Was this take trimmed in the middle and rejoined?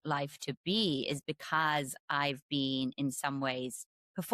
no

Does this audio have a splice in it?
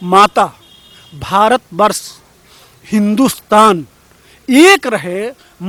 no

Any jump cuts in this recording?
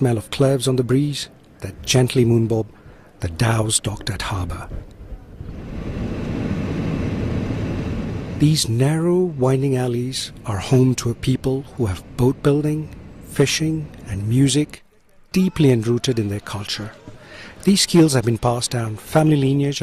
yes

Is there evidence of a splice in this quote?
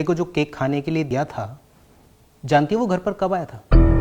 yes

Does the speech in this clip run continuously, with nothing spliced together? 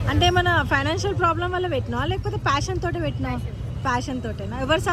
yes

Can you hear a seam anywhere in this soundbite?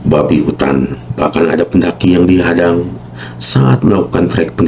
yes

